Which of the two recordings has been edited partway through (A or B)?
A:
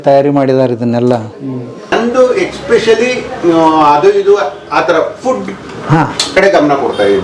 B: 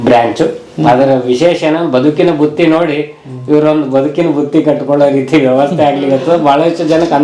A